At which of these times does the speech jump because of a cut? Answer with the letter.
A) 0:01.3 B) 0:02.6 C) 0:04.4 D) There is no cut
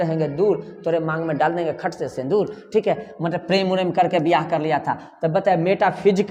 D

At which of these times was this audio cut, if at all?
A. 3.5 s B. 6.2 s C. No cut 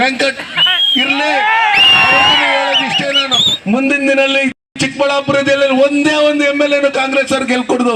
A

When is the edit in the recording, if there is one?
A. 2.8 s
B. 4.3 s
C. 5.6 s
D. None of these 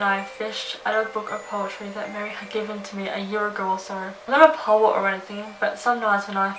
B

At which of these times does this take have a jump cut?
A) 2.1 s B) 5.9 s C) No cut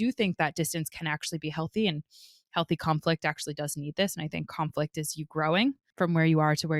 B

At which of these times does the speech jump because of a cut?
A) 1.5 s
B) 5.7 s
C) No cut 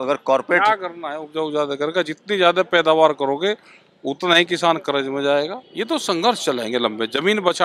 B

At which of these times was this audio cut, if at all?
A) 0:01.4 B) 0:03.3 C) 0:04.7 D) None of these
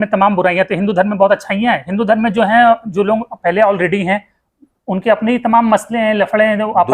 D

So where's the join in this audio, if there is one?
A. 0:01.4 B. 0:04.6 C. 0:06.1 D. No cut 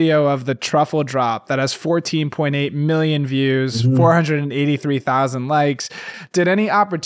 C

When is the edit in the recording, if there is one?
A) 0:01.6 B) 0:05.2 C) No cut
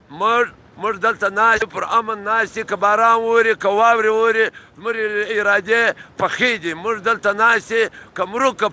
A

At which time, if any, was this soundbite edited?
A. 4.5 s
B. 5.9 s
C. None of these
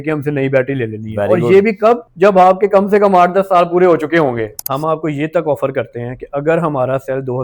A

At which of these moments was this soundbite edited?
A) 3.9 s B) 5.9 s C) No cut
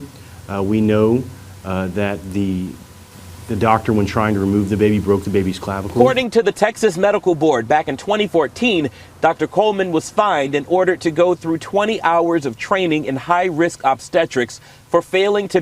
B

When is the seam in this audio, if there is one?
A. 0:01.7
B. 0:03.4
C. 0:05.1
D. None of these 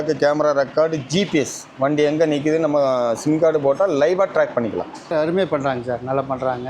C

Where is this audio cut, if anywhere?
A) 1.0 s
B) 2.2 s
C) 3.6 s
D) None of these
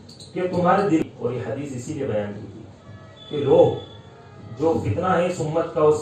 A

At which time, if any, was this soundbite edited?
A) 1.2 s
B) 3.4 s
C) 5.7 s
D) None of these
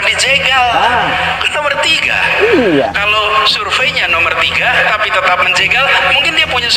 D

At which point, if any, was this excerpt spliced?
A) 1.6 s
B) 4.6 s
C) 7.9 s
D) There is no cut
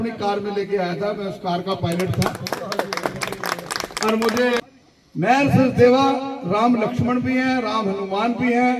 B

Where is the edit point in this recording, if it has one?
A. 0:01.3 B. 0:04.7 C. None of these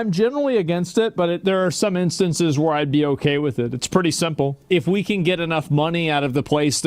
B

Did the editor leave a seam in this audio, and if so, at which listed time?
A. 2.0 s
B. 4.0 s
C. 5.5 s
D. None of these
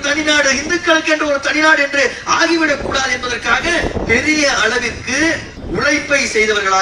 D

